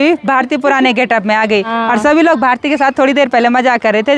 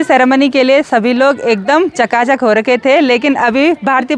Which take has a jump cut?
first; 1 cut; at 1.7 s

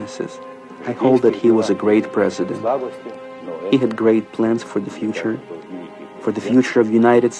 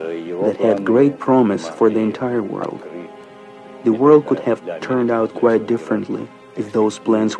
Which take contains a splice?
second; 1 cut; at 2.8 s

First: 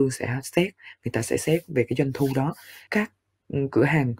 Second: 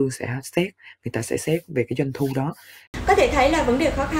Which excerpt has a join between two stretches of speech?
first; 1 cut; at 2.8 s

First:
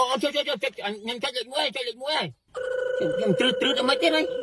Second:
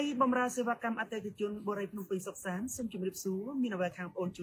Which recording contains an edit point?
first; 1 cut; at 2.4 s

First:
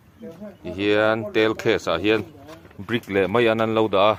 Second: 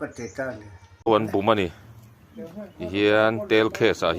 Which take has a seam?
second; 1 cut; at 1.1 s

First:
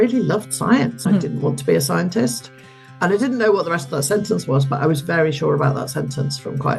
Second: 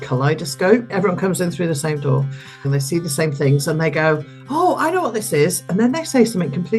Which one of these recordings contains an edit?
second; 2 cuts; at 0.9 s, 2.7 s

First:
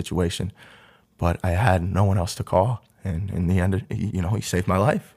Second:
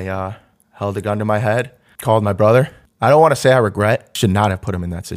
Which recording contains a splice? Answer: second; 3 cuts; at 1.8 s, 2.8 s, 4.1 s

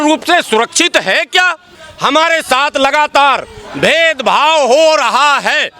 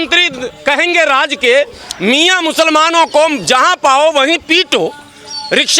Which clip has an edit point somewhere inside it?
first; 1 cut; at 1.8 s

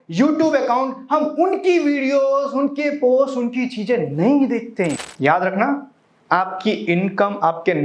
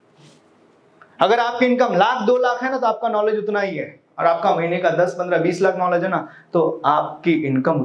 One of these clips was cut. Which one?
first; 1 cut; at 5.1 s

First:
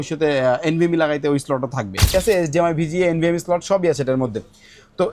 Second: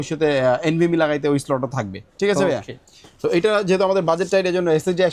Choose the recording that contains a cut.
first; 1 cut; at 2.1 s

